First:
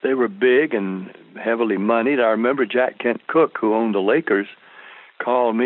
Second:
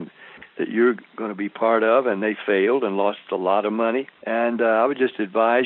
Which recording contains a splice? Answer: second; 1 cut; at 4.2 s

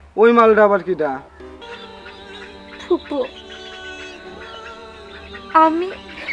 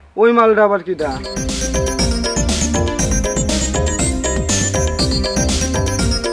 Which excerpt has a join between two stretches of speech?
first; 1 cut; at 1.2 s

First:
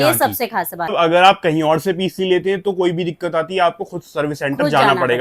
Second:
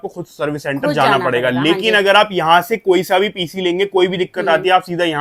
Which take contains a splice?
first; 1 cut; at 0.9 s

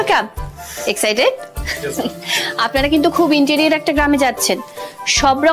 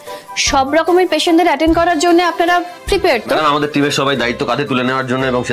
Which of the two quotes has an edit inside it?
second; 1 cut; at 3.4 s

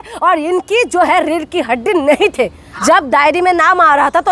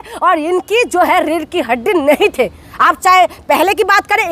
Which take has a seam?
first; 1 cut; at 2.6 s

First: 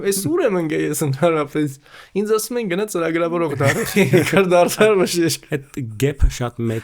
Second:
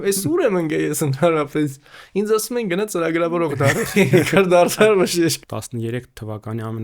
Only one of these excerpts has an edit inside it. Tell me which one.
second; 1 cut; at 5.4 s

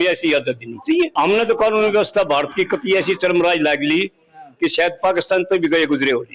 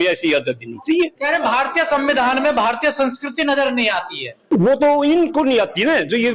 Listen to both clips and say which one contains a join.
first; 1 cut; at 1.1 s

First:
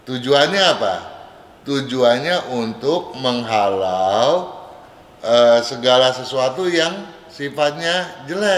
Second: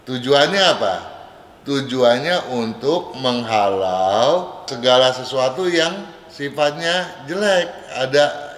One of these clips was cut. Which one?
second; 1 cut; at 4.7 s

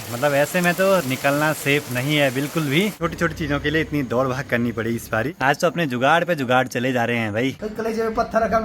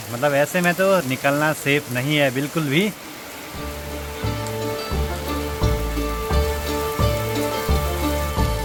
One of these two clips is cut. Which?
first; 3 cuts; at 3.0 s, 5.3 s, 7.6 s

